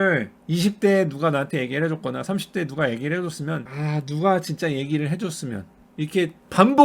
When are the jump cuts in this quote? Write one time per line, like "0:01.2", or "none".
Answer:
0:03.7